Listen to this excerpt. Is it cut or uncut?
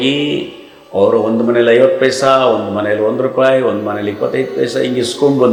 uncut